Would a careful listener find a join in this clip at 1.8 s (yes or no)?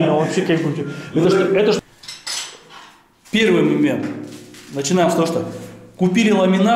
yes